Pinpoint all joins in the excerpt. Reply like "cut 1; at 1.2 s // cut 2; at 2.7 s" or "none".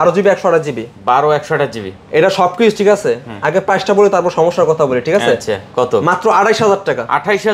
none